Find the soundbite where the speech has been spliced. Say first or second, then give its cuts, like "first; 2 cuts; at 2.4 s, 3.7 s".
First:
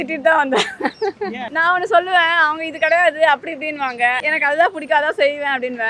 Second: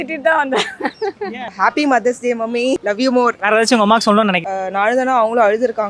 second; 2 cuts; at 1.5 s, 4.4 s